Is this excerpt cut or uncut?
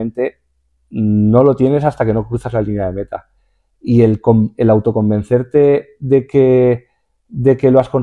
uncut